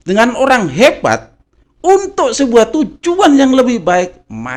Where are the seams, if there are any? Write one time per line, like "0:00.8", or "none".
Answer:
none